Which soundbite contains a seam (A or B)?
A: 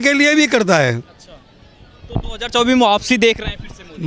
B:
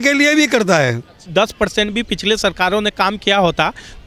B